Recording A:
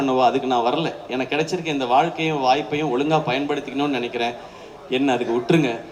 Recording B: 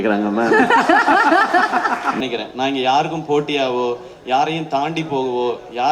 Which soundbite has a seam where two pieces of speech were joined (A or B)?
B